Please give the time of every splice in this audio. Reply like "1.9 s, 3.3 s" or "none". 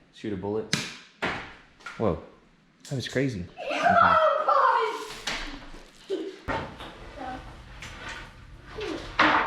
3.5 s